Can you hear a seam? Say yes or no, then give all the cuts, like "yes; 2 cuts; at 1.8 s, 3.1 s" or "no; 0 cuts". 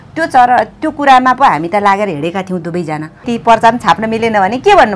yes; 1 cut; at 3.3 s